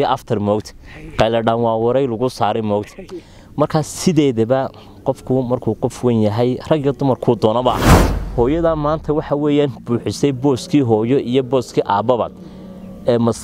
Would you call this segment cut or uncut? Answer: cut